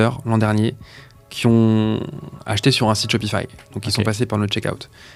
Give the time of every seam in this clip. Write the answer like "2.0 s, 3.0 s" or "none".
none